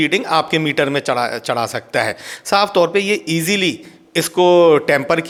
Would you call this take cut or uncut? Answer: uncut